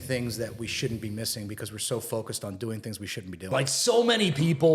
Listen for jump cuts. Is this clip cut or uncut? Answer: cut